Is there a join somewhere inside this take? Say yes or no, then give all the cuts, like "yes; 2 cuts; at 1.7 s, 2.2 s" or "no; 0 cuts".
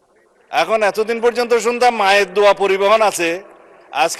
no; 0 cuts